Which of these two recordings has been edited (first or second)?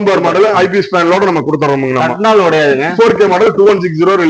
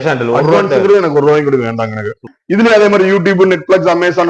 second